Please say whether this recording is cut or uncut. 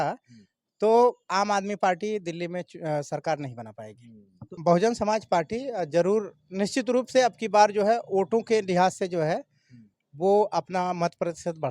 cut